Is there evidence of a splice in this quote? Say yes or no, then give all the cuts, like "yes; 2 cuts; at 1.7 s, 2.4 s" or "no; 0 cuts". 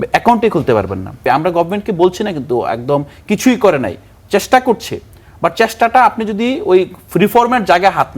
yes; 1 cut; at 1.2 s